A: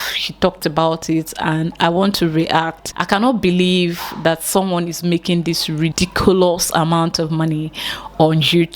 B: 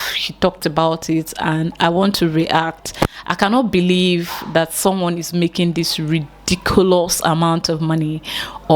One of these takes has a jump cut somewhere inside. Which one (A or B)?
A